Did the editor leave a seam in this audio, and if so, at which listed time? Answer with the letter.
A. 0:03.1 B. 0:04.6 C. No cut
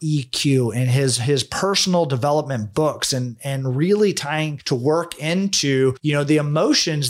B